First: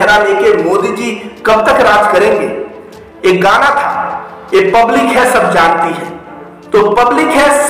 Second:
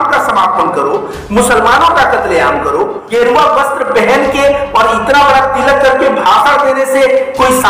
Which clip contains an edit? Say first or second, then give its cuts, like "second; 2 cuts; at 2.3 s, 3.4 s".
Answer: second; 1 cut; at 3.0 s